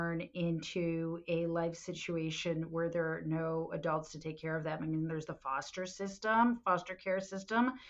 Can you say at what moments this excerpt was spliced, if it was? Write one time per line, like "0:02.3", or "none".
none